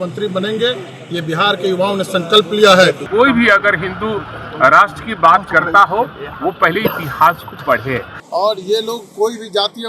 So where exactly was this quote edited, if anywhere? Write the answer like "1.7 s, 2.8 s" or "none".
3.0 s, 8.1 s

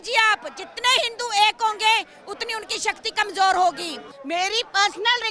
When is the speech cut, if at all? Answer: 4.0 s

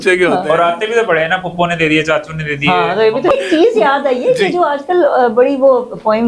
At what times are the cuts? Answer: 3.3 s

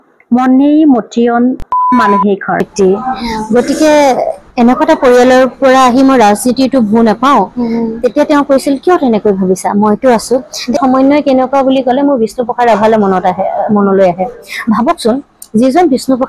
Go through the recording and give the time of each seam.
2.7 s, 10.8 s

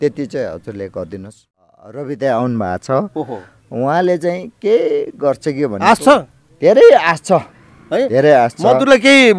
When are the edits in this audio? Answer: 1.8 s

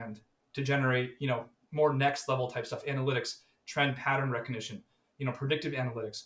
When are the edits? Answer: none

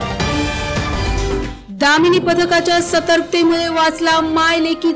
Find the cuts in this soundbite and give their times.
1.4 s

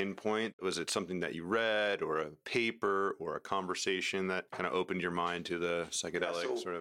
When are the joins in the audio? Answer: none

